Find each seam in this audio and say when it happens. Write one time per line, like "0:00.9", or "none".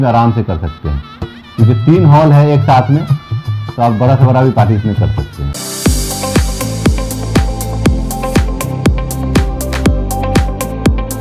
0:05.5